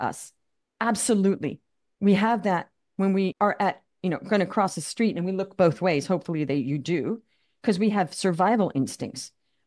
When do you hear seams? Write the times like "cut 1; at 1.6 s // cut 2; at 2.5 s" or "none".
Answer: cut 1; at 3.3 s